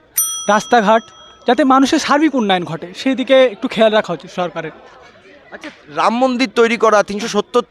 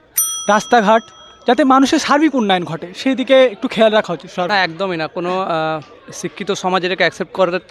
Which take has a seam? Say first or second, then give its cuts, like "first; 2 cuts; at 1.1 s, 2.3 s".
second; 1 cut; at 4.5 s